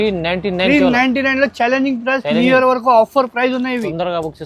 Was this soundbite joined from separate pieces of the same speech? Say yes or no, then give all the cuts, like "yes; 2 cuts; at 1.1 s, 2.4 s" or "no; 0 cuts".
no; 0 cuts